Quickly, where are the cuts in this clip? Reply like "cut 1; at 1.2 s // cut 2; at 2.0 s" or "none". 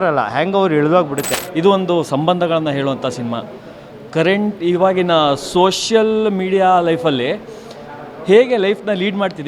cut 1; at 1.3 s